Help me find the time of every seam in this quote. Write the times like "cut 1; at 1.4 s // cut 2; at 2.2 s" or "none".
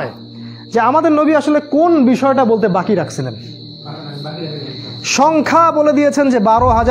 none